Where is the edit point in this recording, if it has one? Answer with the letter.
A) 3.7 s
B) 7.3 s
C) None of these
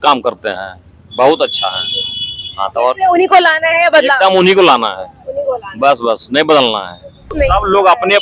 B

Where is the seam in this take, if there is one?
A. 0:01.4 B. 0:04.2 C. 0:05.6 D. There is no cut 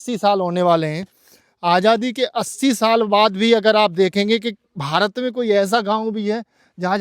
D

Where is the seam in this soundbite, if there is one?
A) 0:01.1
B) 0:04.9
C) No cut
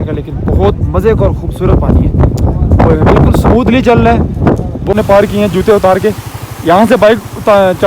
B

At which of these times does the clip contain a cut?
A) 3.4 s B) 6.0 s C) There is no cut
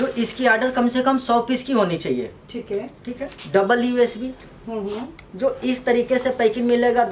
A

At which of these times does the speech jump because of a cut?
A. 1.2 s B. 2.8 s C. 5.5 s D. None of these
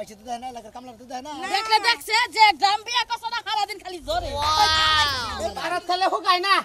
C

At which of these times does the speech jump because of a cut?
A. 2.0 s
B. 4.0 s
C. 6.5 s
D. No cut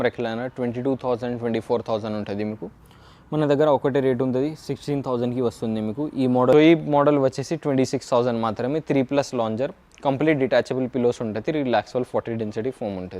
C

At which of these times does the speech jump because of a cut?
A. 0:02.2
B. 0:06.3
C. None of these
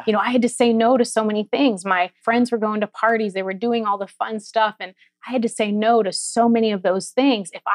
A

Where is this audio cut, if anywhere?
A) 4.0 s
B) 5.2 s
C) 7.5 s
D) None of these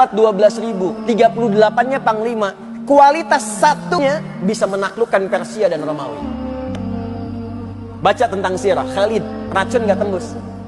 A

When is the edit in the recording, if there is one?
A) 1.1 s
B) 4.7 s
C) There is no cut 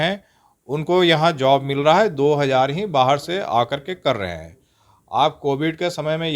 C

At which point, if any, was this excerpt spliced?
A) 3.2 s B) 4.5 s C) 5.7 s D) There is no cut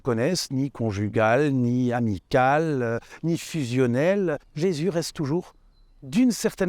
B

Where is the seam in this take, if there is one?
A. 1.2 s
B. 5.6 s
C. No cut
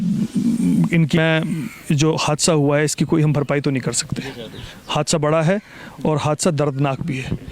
A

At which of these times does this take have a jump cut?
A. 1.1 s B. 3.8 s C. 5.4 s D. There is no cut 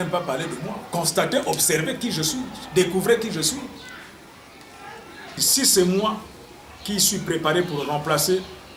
C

